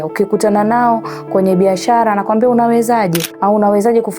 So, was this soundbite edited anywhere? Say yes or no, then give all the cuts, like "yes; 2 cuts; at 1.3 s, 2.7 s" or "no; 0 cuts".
yes; 1 cut; at 3.3 s